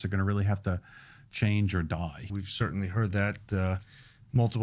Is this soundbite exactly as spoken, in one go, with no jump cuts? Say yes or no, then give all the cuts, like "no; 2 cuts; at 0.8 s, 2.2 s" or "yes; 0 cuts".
no; 1 cut; at 2.3 s